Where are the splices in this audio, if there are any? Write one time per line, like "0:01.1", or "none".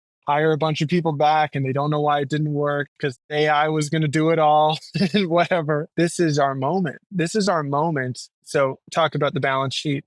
0:03.2
0:05.9
0:08.4